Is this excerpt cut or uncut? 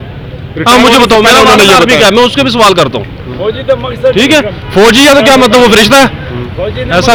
uncut